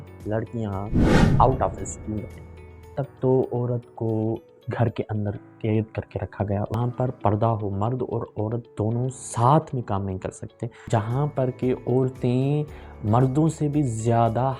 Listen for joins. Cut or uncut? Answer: cut